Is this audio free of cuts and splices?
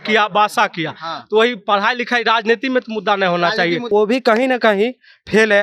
no; 1 cut; at 3.9 s

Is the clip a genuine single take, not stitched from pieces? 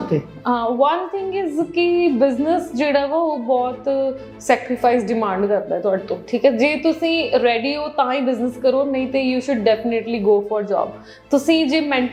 yes; 0 cuts

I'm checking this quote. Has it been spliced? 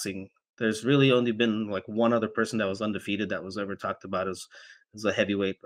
no; 0 cuts

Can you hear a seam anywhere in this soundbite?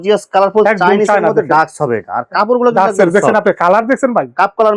no; 0 cuts

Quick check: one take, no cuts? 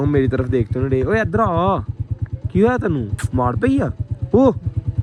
yes; 0 cuts

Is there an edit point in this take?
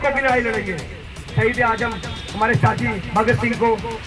yes; 1 cut; at 1.2 s

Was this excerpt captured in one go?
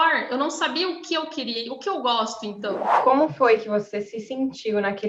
no; 1 cut; at 2.9 s

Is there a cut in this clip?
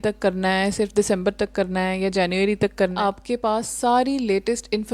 yes; 1 cut; at 3.0 s

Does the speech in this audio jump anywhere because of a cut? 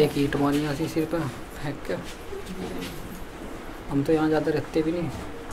no; 0 cuts

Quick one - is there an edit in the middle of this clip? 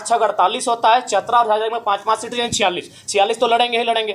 no; 0 cuts

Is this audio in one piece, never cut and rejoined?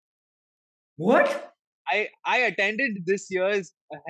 yes; 0 cuts

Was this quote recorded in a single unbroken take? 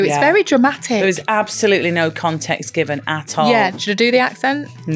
no; 1 cut; at 3.7 s

